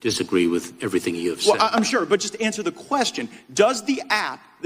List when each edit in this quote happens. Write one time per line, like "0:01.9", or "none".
none